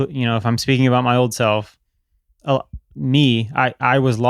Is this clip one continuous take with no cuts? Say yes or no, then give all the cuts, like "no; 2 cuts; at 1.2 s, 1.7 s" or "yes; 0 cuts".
yes; 0 cuts